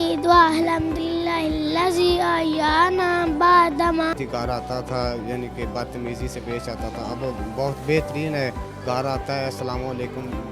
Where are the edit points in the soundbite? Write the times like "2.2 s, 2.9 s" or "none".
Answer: 4.1 s